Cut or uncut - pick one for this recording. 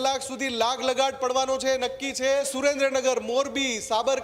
cut